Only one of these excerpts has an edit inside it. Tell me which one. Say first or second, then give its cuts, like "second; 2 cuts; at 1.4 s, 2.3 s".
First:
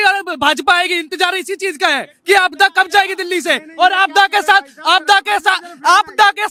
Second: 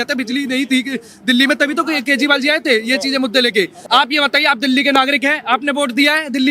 second; 1 cut; at 3.8 s